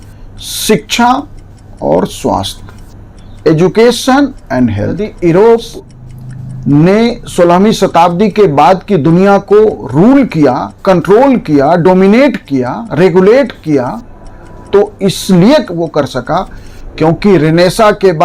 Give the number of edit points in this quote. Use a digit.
1